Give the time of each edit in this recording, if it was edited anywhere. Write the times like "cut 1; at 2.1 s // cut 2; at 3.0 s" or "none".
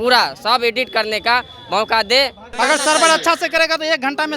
cut 1; at 2.4 s